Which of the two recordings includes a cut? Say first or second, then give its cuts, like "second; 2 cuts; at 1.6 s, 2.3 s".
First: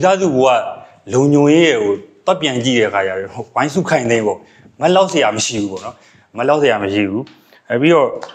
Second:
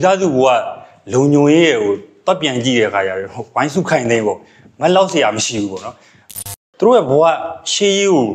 second; 1 cut; at 6.4 s